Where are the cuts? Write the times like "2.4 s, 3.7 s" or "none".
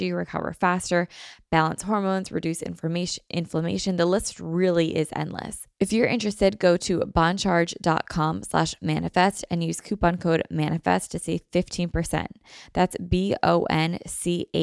5.6 s